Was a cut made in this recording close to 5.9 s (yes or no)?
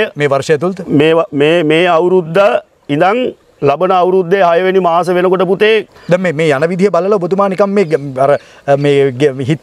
yes